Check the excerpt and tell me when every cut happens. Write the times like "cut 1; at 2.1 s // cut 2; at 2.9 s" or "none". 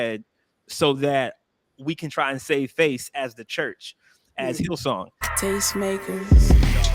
cut 1; at 5.3 s